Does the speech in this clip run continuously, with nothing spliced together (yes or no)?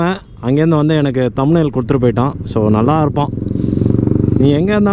yes